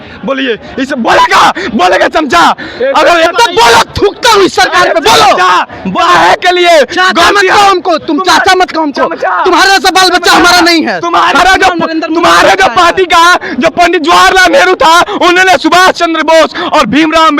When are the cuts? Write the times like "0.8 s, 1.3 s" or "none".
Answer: 3.3 s, 11.4 s